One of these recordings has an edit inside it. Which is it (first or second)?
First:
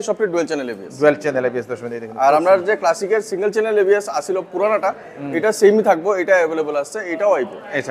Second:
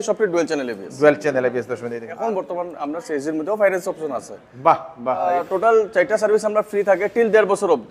second